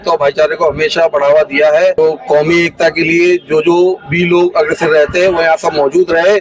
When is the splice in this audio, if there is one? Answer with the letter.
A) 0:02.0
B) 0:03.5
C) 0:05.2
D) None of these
A